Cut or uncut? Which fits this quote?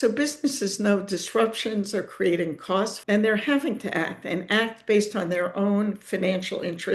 cut